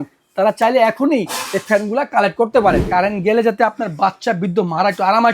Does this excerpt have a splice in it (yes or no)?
yes